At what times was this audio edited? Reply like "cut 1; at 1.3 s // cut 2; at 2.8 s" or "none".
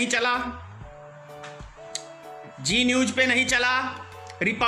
none